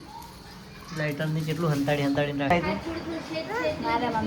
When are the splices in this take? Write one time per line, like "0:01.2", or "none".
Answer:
0:02.5

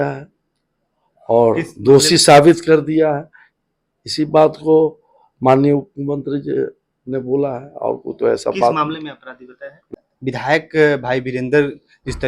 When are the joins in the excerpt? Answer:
0:09.9

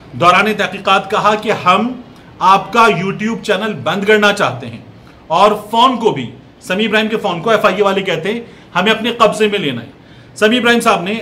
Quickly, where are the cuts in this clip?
none

